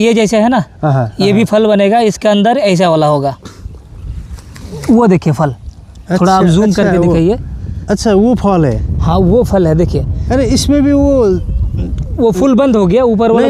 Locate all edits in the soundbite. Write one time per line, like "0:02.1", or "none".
0:03.5

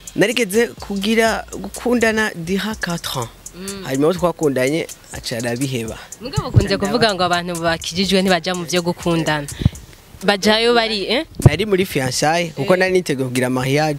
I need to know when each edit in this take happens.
none

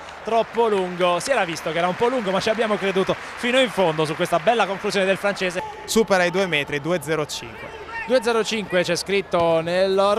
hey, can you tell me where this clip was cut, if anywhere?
none

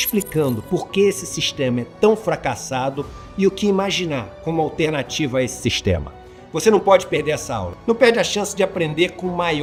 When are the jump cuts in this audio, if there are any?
none

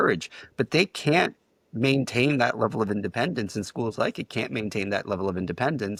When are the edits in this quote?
none

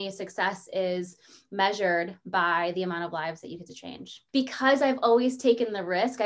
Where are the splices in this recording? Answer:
0:04.1

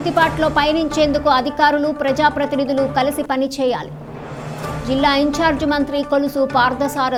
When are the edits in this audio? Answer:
none

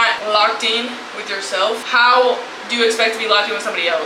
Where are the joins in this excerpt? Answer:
none

